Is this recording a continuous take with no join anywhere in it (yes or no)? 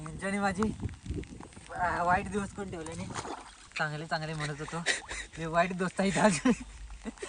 no